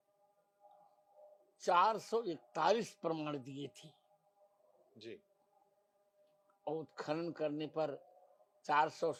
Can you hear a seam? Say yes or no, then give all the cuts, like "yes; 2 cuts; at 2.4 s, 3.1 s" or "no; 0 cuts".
no; 0 cuts